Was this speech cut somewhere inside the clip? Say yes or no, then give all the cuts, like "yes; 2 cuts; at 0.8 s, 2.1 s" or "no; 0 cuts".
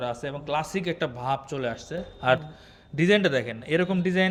no; 0 cuts